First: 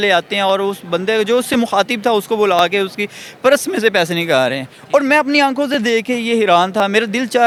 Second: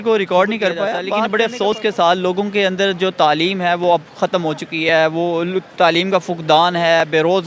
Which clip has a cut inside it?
second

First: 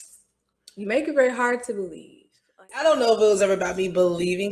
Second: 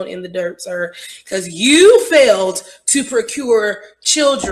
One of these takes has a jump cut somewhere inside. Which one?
first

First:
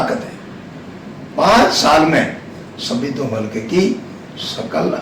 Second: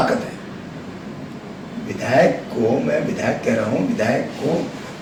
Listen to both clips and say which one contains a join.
first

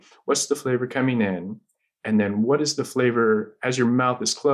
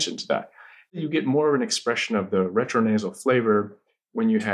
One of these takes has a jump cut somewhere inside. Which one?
second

